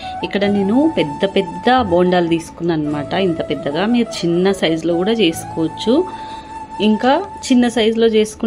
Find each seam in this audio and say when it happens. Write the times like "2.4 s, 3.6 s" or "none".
none